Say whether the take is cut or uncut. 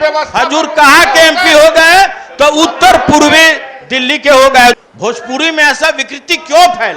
cut